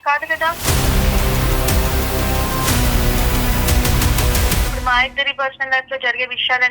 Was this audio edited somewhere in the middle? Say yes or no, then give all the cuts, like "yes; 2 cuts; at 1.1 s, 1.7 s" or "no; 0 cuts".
yes; 1 cut; at 4.7 s